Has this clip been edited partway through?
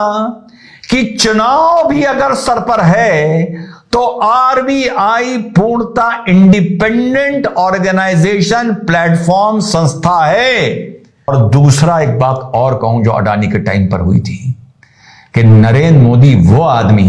yes; 1 cut; at 11.3 s

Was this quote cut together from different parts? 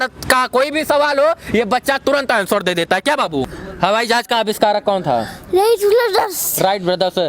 yes; 1 cut; at 3.6 s

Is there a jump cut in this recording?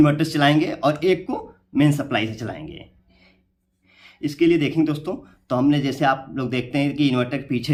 no; 0 cuts

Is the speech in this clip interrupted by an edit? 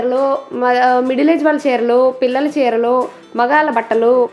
no; 0 cuts

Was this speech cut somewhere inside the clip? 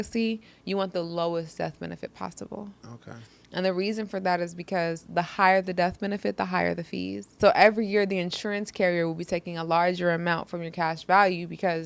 yes; 1 cut; at 7.2 s

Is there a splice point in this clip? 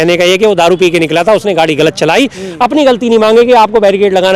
no; 0 cuts

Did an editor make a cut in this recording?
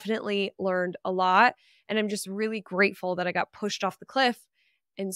no; 0 cuts

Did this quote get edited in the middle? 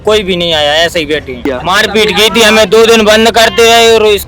yes; 1 cut; at 1.6 s

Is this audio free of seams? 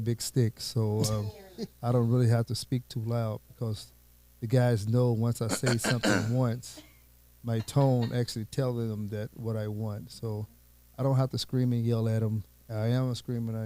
yes; 0 cuts

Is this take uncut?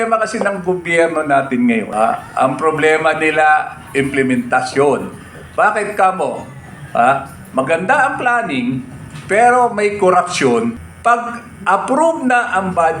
no; 2 cuts; at 1.9 s, 10.9 s

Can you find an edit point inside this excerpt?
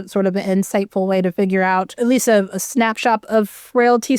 yes; 1 cut; at 1.9 s

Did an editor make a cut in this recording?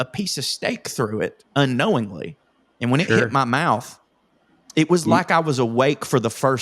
no; 0 cuts

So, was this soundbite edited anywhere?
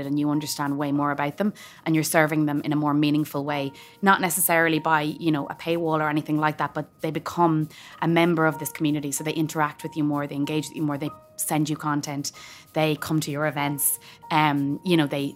no; 0 cuts

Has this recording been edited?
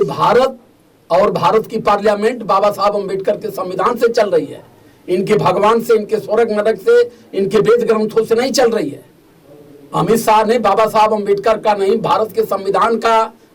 no; 0 cuts

